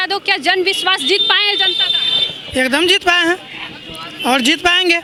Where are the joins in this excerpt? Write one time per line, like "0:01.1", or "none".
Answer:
none

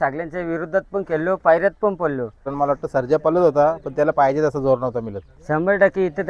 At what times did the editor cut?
0:02.5

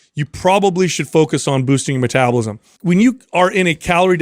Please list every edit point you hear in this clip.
0:02.7

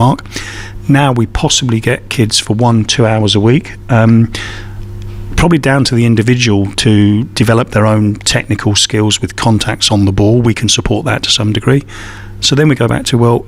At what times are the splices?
none

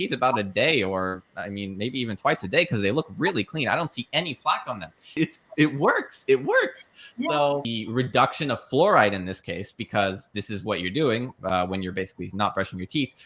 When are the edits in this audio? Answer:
0:05.1
0:07.7

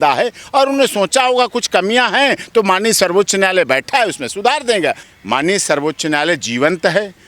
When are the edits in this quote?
0:05.1

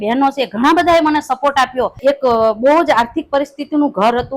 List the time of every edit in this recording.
0:02.0

